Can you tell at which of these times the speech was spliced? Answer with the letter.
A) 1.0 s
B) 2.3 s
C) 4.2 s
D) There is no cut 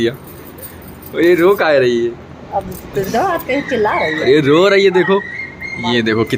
D